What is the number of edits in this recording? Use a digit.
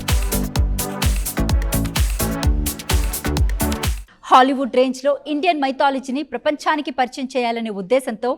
1